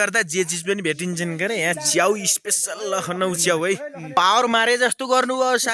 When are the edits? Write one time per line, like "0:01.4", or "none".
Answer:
0:04.1